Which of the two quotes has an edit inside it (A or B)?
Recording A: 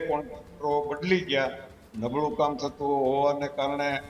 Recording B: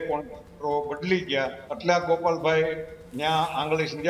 B